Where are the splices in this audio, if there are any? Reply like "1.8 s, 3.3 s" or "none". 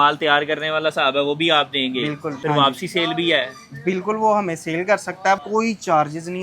2.3 s, 5.4 s